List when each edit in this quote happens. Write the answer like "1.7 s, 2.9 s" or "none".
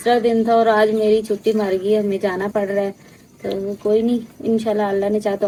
none